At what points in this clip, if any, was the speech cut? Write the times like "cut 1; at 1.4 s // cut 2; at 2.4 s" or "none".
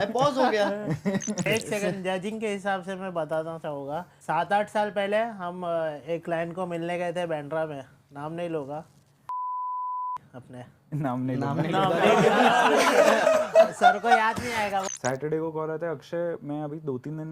cut 1; at 1.5 s // cut 2; at 4.1 s // cut 3; at 14.9 s

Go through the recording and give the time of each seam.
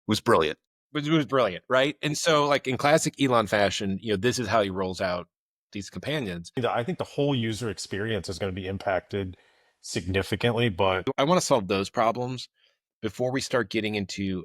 cut 1; at 6.6 s // cut 2; at 11.1 s

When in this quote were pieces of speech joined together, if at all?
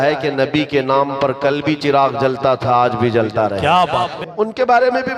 cut 1; at 4.1 s

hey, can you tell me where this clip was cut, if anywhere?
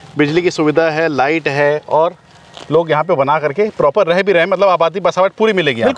none

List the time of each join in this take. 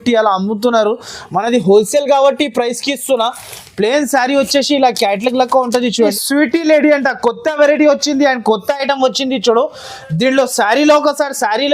cut 1; at 6.1 s

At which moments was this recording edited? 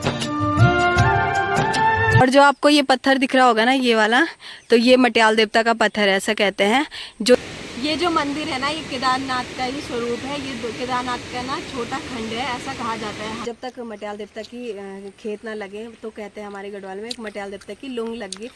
cut 1; at 2.2 s // cut 2; at 7.4 s // cut 3; at 13.4 s

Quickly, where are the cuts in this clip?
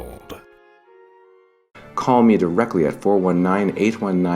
cut 1; at 1.7 s

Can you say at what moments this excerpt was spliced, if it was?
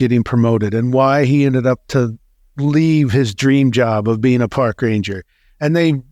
none

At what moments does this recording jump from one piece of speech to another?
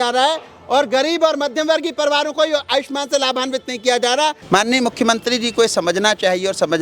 cut 1; at 4.4 s

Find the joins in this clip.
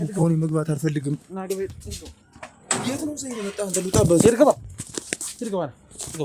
none

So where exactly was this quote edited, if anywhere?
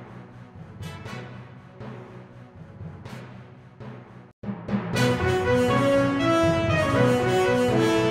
none

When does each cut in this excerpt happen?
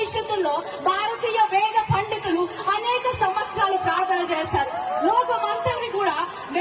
none

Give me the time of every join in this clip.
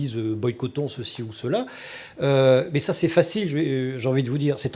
none

